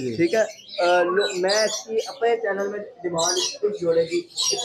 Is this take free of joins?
yes; 0 cuts

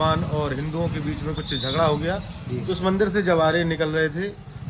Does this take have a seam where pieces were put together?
no; 0 cuts

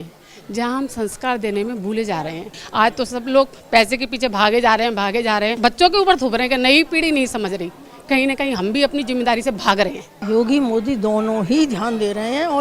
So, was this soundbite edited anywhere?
yes; 3 cuts; at 2.6 s, 5.5 s, 10.1 s

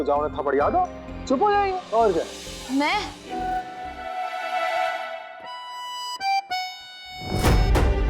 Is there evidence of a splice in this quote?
yes; 1 cut; at 3.5 s

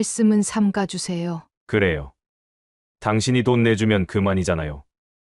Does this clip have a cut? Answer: no; 0 cuts

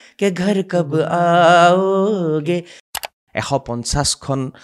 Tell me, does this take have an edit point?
yes; 1 cut; at 2.9 s

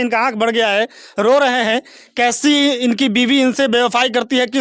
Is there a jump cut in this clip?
no; 0 cuts

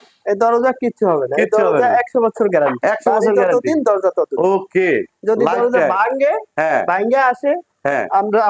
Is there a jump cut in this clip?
no; 0 cuts

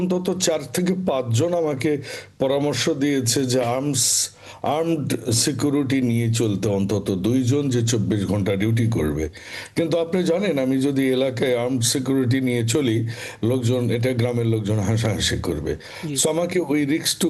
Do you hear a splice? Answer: no; 0 cuts

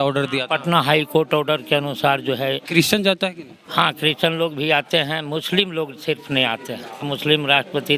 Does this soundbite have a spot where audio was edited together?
yes; 2 cuts; at 2.6 s, 7.1 s

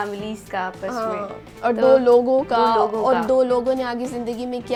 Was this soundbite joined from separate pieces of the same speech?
no; 0 cuts

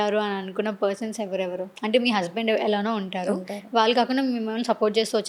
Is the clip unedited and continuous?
yes; 0 cuts

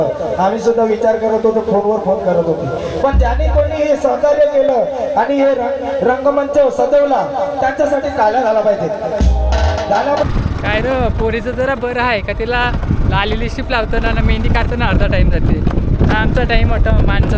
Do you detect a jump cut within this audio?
yes; 1 cut; at 10.2 s

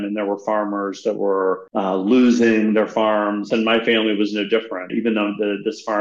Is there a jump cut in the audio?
yes; 3 cuts; at 1.6 s, 3.5 s, 4.9 s

